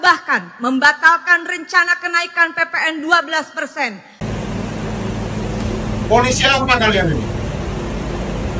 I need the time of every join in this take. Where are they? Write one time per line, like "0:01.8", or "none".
0:04.1